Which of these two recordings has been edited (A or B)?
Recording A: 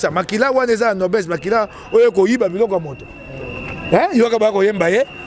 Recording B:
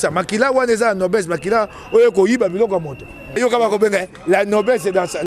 B